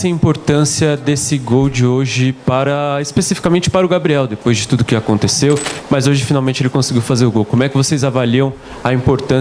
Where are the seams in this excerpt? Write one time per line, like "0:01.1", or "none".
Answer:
0:05.7